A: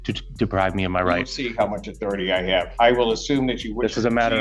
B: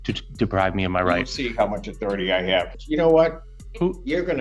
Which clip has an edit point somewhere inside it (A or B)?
B